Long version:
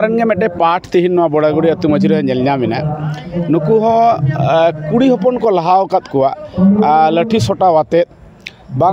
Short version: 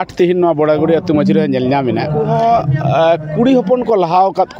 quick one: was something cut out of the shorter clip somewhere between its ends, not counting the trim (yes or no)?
yes